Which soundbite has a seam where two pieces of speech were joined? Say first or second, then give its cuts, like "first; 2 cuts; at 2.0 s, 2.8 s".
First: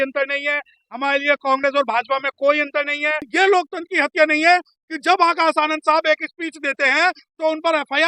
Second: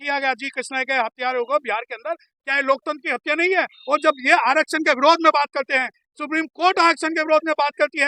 first; 1 cut; at 3.3 s